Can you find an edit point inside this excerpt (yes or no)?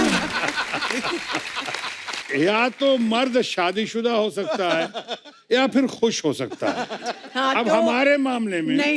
yes